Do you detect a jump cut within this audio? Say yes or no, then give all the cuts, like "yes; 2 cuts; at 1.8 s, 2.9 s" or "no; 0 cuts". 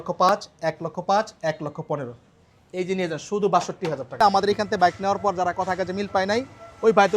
yes; 1 cut; at 4.4 s